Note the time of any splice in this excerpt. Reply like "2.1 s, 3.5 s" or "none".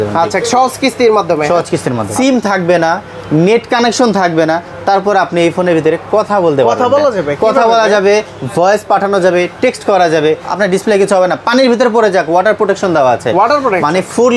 2.0 s, 10.5 s